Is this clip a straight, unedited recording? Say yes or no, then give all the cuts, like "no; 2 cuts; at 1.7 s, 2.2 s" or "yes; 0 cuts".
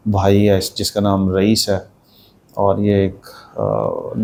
yes; 0 cuts